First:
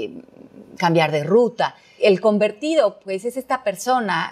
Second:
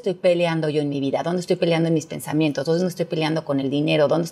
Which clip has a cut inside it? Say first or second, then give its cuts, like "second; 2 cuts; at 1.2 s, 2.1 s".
first; 1 cut; at 1.9 s